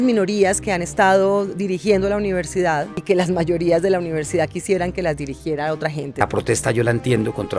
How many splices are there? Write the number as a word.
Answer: one